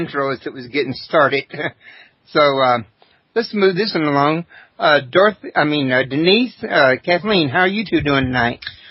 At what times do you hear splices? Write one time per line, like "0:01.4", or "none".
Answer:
0:05.9